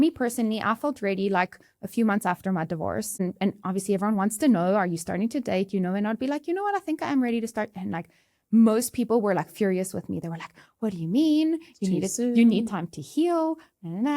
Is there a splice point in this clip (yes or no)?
yes